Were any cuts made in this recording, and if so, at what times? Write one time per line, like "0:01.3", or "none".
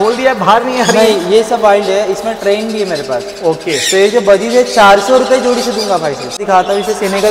0:06.4